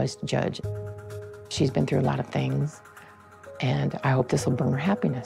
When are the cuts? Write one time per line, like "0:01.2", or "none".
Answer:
none

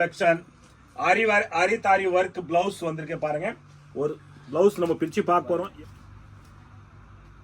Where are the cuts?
0:05.7

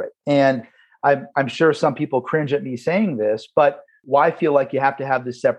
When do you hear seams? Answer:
0:04.0

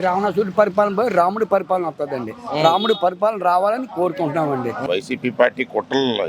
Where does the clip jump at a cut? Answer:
0:04.9

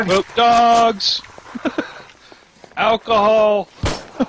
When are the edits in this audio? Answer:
none

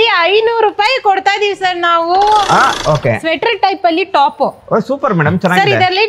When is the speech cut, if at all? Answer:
0:02.7

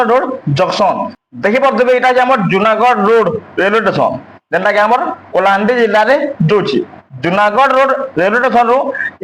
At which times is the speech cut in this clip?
0:01.1

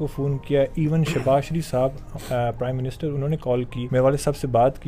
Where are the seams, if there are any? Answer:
0:03.8

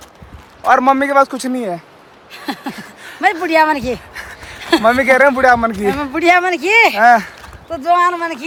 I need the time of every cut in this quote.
none

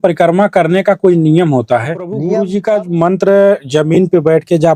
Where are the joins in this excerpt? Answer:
0:02.2

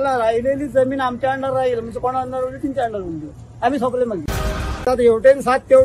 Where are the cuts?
0:04.8

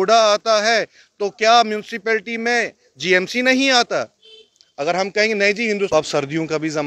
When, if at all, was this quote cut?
0:05.9

